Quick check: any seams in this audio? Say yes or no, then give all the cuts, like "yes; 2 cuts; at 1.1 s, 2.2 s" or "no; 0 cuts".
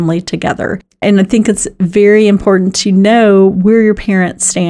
yes; 1 cut; at 1.0 s